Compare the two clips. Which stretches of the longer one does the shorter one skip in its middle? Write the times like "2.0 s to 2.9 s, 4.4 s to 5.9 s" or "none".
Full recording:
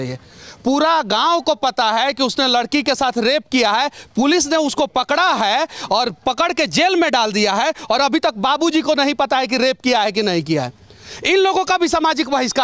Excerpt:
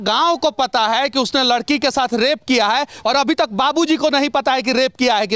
4.0 s to 7.8 s

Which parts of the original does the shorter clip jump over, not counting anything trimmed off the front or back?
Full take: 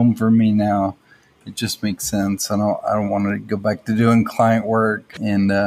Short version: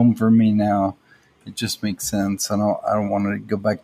none

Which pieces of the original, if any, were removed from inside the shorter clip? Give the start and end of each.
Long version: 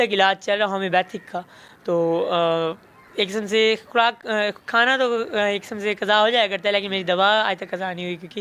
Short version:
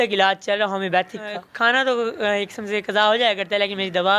1.4 s to 4.6 s

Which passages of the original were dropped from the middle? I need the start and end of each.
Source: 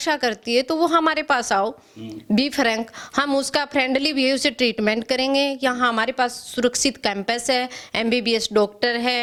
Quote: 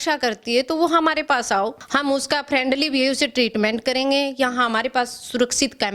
1.8 s to 3.0 s

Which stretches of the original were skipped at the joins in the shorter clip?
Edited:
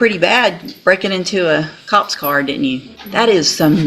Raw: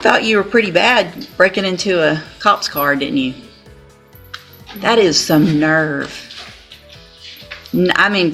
3.5 s to 4.7 s

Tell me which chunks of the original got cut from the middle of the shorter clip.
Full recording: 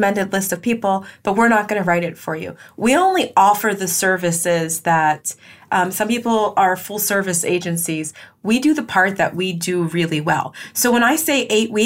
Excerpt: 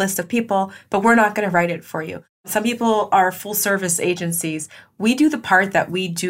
2.8 s to 5.9 s

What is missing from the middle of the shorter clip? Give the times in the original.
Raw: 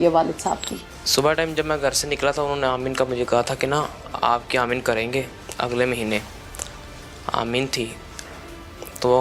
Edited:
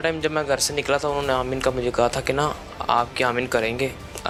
none

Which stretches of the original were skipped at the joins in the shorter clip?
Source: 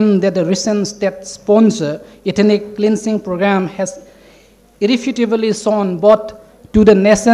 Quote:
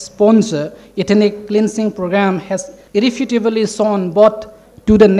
4.0 s to 4.6 s

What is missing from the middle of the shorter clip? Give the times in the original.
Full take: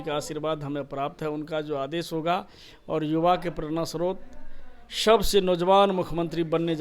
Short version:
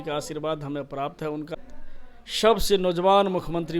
1.5 s to 4.2 s

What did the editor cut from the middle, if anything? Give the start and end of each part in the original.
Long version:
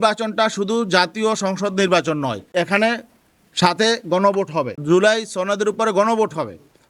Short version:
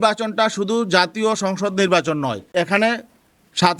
none

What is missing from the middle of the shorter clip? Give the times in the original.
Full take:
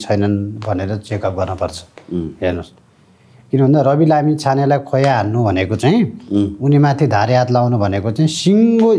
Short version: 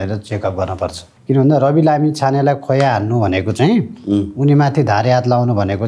1.9 s to 3.3 s

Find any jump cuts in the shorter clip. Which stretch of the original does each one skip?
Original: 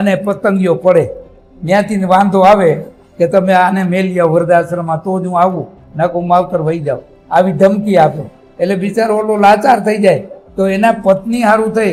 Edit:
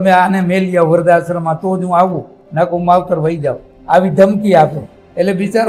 none

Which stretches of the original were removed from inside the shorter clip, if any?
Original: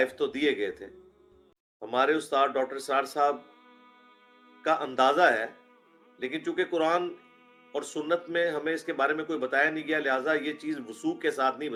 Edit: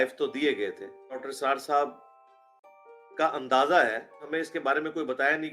1.3 s to 2.7 s, 5.7 s to 8.6 s

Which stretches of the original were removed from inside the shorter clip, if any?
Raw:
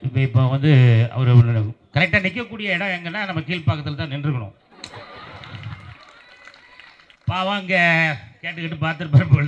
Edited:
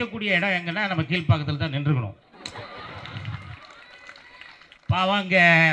none

